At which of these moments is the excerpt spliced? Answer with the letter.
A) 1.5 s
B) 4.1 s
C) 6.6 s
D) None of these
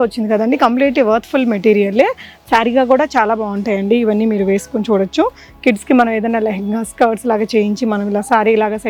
D